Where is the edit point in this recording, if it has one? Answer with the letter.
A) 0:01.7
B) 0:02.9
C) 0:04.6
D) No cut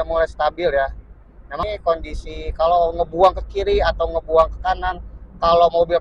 A